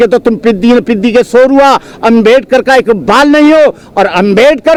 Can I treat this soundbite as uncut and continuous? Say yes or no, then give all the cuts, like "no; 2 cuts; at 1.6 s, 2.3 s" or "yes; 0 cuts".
yes; 0 cuts